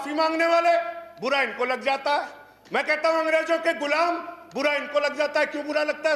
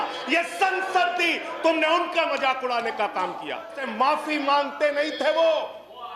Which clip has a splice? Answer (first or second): second